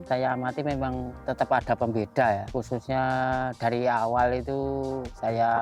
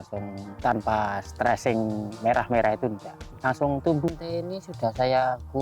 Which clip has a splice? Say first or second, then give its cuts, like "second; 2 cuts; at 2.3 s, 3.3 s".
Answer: second; 1 cut; at 4.2 s